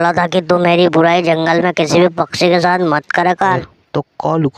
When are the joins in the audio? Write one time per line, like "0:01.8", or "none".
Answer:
0:03.6